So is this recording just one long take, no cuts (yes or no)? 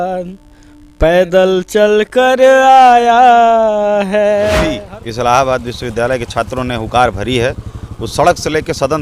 no